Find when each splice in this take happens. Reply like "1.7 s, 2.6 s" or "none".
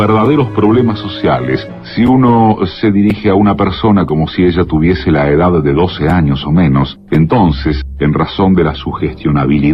none